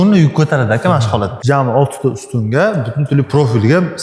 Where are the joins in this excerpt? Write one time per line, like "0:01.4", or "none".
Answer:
0:01.4